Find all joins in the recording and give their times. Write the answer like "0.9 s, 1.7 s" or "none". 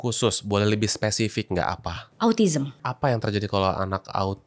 2.8 s